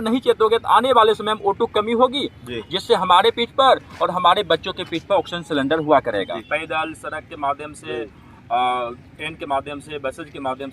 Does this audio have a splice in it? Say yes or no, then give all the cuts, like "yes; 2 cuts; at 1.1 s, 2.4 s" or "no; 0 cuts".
yes; 1 cut; at 6.4 s